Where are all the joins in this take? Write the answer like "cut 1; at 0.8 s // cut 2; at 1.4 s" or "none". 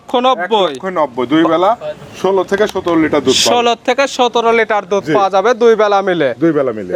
none